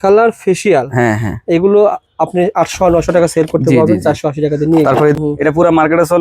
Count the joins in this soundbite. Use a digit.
1